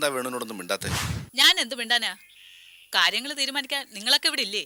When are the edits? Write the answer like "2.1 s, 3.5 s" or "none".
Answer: none